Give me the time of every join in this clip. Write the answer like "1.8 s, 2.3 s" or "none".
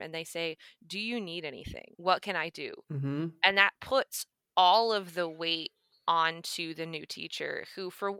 2.7 s